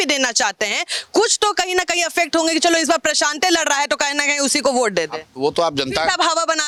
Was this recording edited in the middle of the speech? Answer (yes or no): no